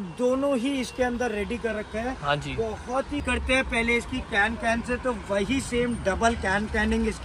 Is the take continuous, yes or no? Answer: no